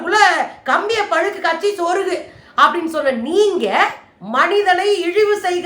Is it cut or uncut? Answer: cut